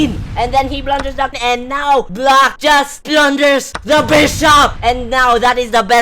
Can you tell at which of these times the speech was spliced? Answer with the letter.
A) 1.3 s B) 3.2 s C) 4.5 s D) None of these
A